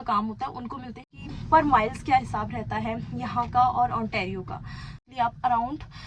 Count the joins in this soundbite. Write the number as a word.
two